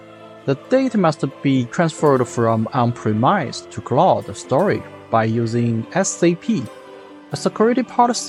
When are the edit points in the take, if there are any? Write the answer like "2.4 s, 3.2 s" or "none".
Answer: none

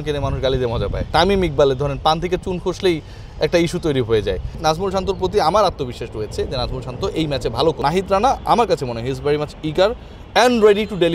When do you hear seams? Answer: 1.1 s, 4.6 s, 7.8 s

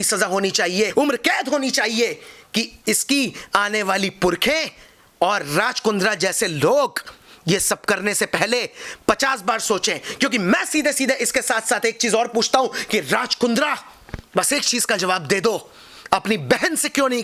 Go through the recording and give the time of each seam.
0.9 s

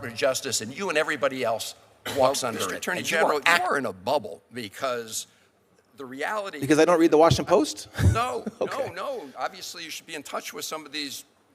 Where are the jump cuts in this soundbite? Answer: 3.6 s, 8.2 s

